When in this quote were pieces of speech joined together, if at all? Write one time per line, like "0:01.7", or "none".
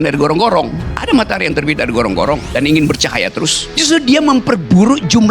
0:00.9
0:02.5
0:03.7